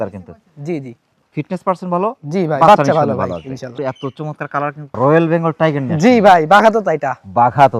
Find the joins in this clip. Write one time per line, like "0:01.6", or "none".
0:04.8

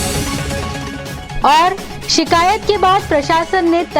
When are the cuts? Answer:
0:01.3

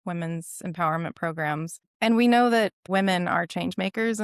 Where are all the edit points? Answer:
0:01.9
0:02.8

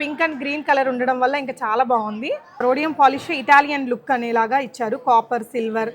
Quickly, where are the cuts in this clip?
0:02.6

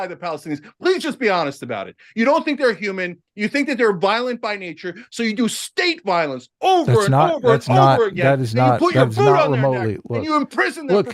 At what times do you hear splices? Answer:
none

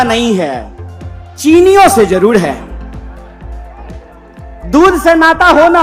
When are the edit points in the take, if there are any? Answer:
none

